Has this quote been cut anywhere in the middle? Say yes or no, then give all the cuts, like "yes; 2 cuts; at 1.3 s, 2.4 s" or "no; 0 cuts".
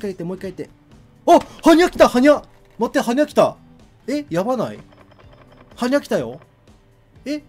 no; 0 cuts